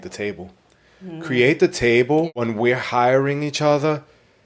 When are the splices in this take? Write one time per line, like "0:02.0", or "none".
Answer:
0:02.4